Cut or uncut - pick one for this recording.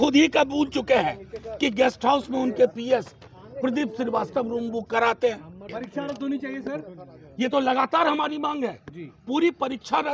cut